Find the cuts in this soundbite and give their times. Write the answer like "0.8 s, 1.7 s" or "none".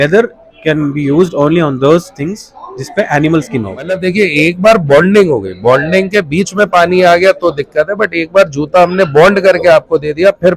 4.0 s